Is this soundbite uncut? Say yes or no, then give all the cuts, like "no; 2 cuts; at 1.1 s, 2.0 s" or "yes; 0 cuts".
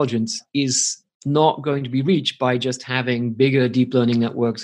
yes; 0 cuts